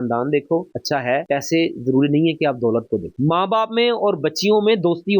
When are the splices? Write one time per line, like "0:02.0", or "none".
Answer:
0:03.1